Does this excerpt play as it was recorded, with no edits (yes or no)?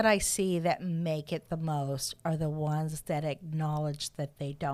yes